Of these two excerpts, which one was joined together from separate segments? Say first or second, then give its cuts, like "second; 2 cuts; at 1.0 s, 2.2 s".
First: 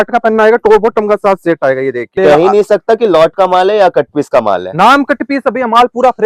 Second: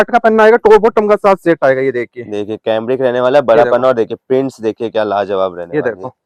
first; 1 cut; at 2.2 s